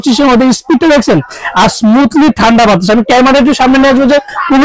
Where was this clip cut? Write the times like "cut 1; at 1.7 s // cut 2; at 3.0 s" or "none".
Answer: none